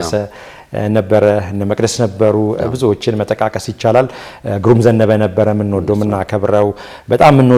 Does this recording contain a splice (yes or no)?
no